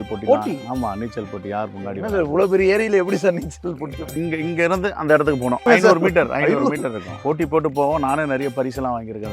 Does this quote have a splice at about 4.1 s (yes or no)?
yes